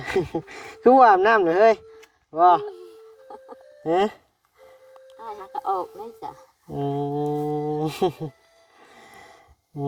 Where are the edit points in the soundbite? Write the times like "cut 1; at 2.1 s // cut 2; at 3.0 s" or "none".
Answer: none